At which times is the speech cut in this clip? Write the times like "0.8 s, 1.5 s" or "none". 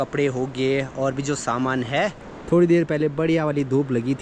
2.3 s